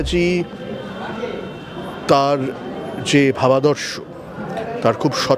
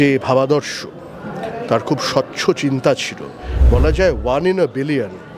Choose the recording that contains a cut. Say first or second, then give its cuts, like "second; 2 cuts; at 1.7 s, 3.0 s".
second; 1 cut; at 3.5 s